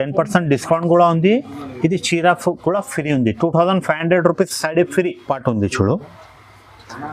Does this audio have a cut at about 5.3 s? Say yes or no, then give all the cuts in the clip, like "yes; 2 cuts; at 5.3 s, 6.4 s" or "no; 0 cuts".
yes; 1 cut; at 5.3 s